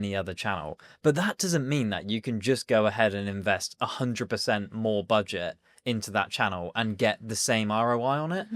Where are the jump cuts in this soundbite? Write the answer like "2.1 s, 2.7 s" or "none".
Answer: none

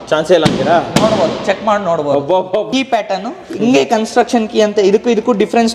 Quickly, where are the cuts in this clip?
2.7 s

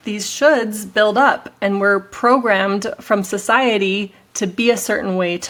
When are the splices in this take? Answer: none

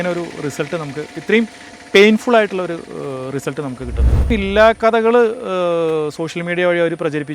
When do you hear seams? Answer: 4.3 s

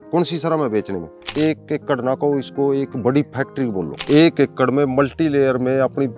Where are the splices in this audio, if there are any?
1.3 s, 3.9 s

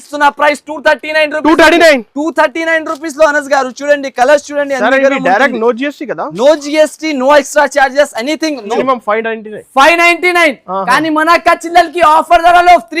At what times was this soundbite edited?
8.7 s

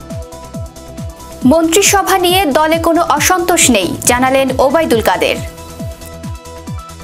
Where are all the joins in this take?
1.4 s, 5.4 s

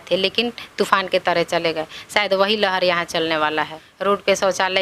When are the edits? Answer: 3.8 s

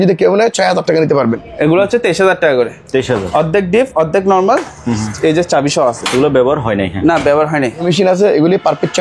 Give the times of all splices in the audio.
1.5 s, 7.8 s

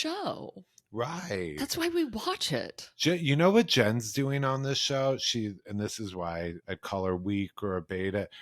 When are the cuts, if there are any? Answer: 2.8 s, 6.6 s

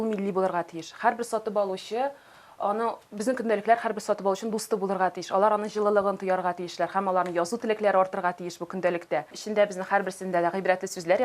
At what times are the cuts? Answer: 9.4 s

